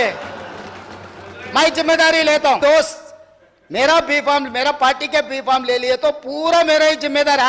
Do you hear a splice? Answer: yes; 1 cut; at 2.6 s

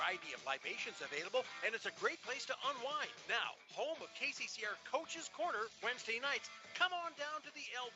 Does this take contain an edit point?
no; 0 cuts

